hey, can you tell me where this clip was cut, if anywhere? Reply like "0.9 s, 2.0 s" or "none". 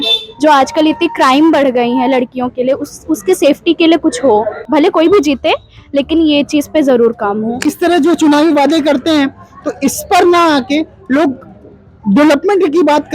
4.6 s, 7.6 s